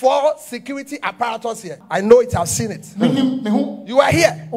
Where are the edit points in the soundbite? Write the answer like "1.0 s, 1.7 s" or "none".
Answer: 1.7 s

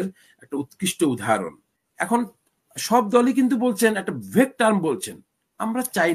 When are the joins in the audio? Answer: 1.8 s

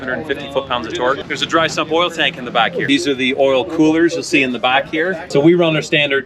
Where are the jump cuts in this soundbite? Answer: 1.2 s, 2.8 s, 5.2 s

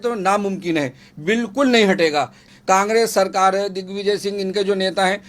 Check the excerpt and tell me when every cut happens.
2.5 s

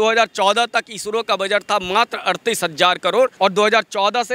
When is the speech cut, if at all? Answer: 3.3 s

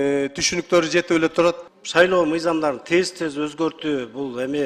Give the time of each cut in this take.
1.7 s

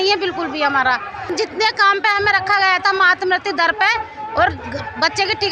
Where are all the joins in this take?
1.3 s

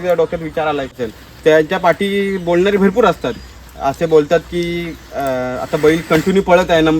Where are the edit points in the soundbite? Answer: 1.1 s

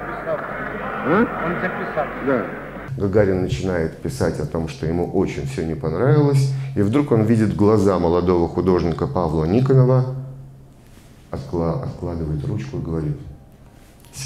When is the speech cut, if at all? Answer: 2.8 s

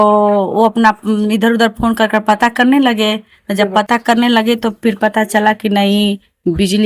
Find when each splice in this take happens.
none

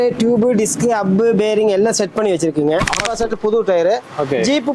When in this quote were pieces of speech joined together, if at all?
3.0 s

